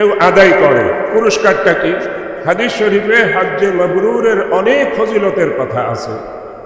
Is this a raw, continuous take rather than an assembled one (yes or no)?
yes